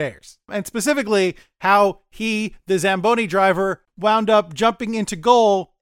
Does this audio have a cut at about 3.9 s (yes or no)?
yes